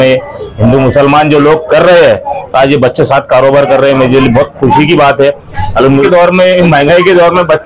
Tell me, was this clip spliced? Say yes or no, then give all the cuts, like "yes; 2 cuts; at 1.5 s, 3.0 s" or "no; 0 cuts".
yes; 1 cut; at 6.0 s